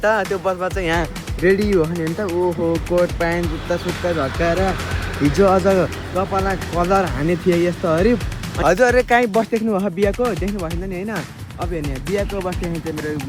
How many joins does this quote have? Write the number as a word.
one